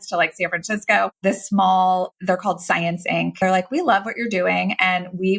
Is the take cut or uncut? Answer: cut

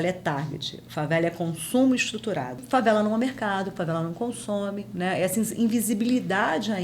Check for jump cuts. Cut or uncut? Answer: cut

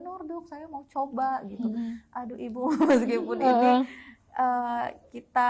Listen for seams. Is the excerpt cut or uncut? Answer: uncut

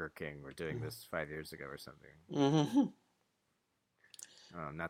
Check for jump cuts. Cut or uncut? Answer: uncut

